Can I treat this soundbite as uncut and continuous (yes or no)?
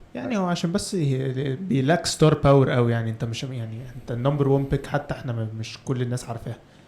yes